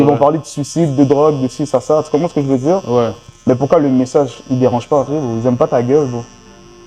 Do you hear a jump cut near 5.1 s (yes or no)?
yes